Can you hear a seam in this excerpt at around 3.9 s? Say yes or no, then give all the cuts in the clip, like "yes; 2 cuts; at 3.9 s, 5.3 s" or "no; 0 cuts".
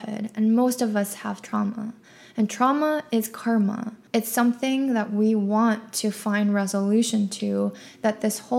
yes; 1 cut; at 3.9 s